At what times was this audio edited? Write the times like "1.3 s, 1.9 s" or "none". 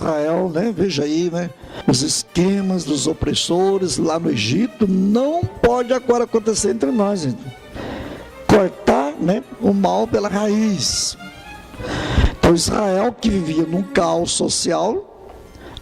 1.7 s